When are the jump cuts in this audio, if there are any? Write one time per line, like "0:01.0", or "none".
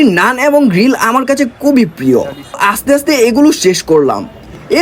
0:02.6